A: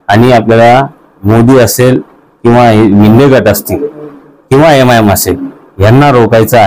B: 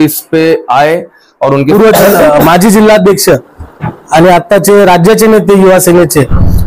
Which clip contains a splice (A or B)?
B